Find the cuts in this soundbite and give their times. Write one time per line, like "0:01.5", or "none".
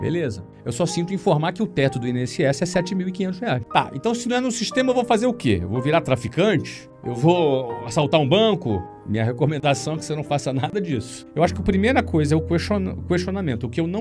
0:03.6
0:11.3